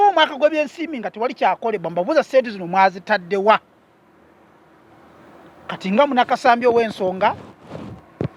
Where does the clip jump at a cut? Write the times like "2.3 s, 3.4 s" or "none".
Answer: none